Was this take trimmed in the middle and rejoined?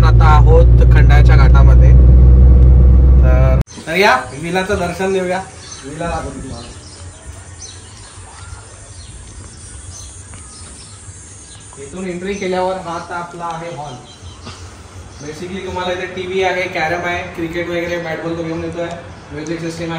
yes; 1 cut; at 3.6 s

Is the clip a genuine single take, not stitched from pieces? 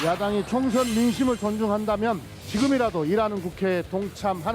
no; 1 cut; at 2.3 s

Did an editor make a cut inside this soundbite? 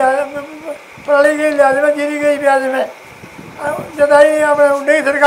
no; 0 cuts

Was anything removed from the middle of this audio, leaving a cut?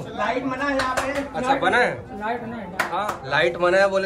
no; 0 cuts

